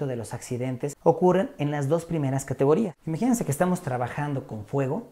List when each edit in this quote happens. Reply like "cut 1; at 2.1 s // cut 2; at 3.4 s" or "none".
cut 1; at 1.0 s // cut 2; at 3.0 s

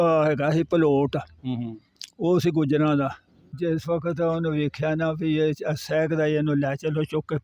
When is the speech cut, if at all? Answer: cut 1; at 3.4 s

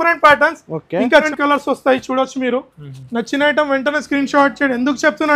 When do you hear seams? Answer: cut 1; at 1.3 s

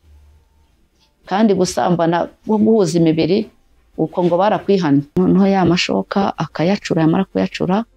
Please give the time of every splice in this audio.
cut 1; at 5.1 s

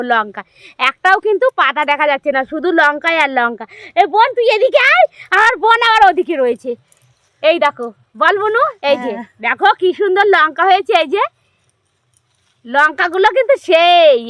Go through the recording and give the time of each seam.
none

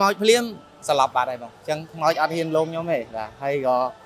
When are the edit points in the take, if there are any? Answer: none

